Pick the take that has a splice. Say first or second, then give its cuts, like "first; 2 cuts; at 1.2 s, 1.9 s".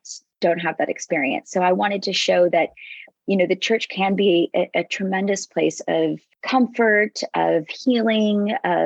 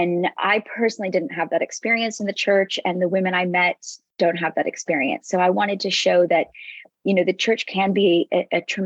first; 1 cut; at 6.3 s